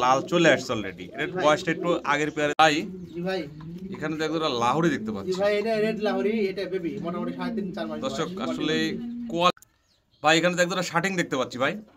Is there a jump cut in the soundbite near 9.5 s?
yes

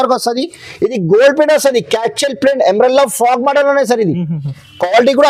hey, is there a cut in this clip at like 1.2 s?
no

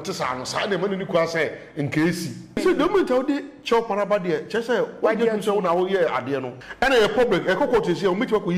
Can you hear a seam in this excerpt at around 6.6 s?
yes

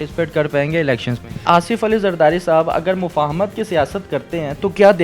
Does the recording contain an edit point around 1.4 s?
yes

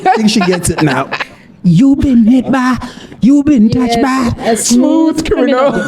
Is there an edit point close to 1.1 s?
yes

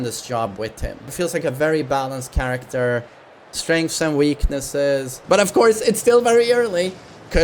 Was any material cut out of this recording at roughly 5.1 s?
yes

